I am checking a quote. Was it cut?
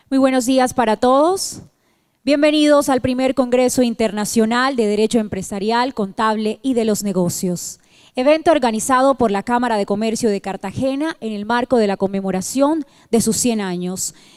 no; 0 cuts

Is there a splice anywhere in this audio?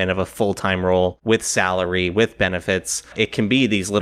yes; 1 cut; at 1.2 s

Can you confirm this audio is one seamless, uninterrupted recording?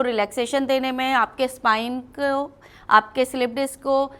yes; 0 cuts

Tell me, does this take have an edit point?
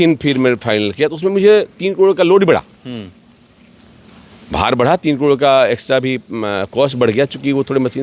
no; 0 cuts

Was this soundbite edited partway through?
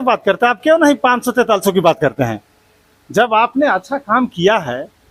no; 0 cuts

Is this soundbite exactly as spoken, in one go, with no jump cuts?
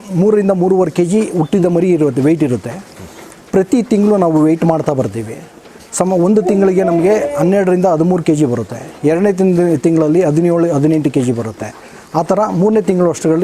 yes; 0 cuts

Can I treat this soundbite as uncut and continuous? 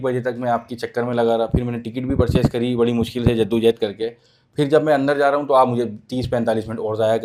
yes; 0 cuts

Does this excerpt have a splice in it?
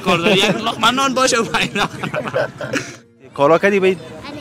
yes; 1 cut; at 3.1 s

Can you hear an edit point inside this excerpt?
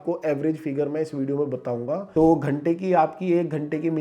yes; 1 cut; at 2.1 s

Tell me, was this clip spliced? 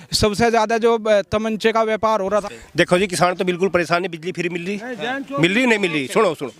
yes; 1 cut; at 2.4 s

